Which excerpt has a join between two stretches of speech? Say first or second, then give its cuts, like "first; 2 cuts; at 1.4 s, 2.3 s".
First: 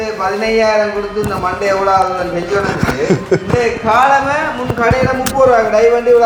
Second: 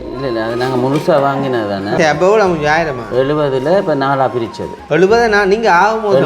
second; 1 cut; at 1.9 s